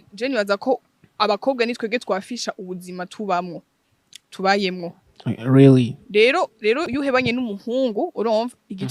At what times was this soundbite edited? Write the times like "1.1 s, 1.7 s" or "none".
6.9 s